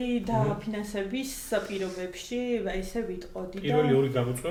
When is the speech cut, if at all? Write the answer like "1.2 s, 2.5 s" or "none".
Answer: none